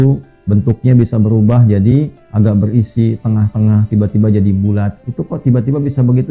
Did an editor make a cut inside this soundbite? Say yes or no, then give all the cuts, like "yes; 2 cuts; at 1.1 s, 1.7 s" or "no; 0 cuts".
no; 0 cuts